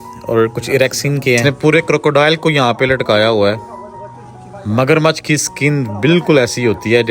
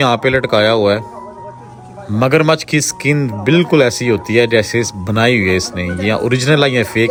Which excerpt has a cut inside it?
first; 1 cut; at 1.4 s

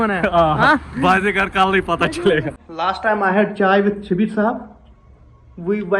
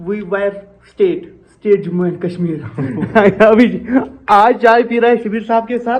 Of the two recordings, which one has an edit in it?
first; 1 cut; at 2.6 s

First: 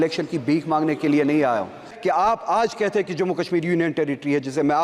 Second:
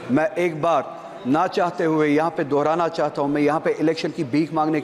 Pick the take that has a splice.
first; 1 cut; at 1.9 s

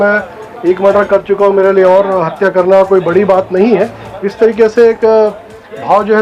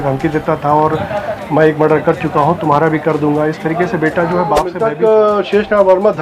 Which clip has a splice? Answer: second; 1 cut; at 4.7 s

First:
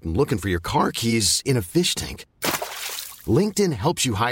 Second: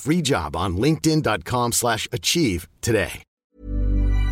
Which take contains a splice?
second; 1 cut; at 3.3 s

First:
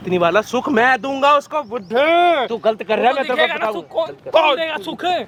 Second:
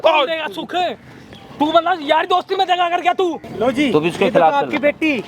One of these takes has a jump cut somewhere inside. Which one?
second; 1 cut; at 3.5 s

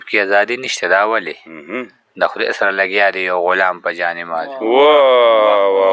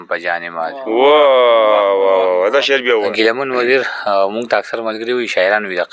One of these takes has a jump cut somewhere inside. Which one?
second; 1 cut; at 3.1 s

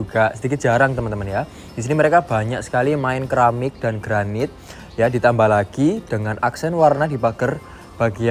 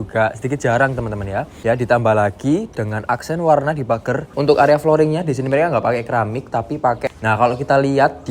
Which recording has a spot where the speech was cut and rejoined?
second; 3 cuts; at 1.5 s, 4.3 s, 7.1 s

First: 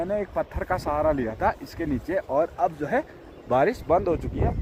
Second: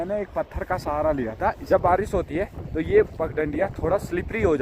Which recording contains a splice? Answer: second; 1 cut; at 1.6 s

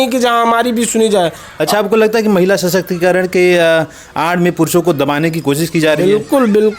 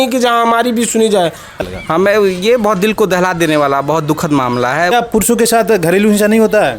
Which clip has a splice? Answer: second; 2 cuts; at 1.6 s, 4.9 s

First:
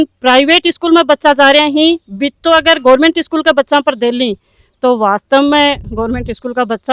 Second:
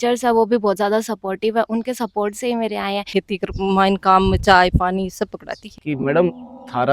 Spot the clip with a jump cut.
second; 2 cuts; at 3.1 s, 5.6 s

